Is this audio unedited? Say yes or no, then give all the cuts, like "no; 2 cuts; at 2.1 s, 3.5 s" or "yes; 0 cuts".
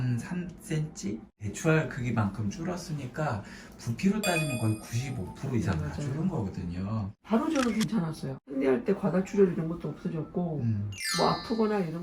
no; 4 cuts; at 1.4 s, 7.1 s, 8.3 s, 11.0 s